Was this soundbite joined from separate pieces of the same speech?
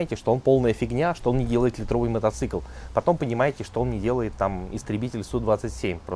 no; 0 cuts

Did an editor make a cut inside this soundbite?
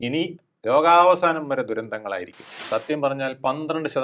yes; 1 cut; at 2.6 s

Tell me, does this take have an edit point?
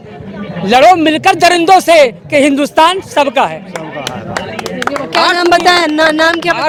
no; 0 cuts

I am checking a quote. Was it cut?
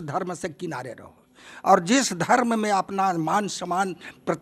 no; 0 cuts

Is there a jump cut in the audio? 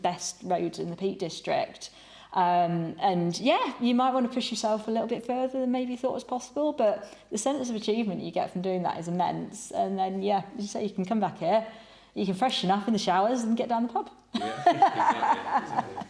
no; 0 cuts

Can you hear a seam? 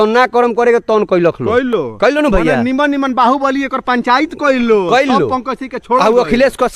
no; 0 cuts

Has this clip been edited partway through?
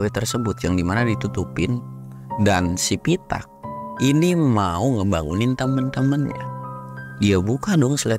no; 0 cuts

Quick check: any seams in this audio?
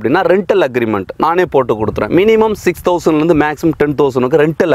no; 0 cuts

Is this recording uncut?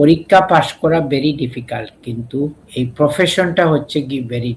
no; 1 cut; at 2.6 s

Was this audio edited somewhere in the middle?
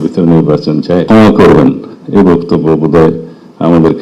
yes; 1 cut; at 1.0 s

